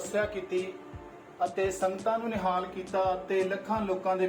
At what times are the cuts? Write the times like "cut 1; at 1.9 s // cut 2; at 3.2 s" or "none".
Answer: none